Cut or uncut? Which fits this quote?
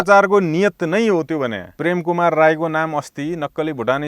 cut